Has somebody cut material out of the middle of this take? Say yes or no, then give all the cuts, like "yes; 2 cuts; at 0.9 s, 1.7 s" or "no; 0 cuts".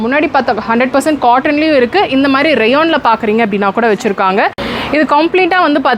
yes; 1 cut; at 4.7 s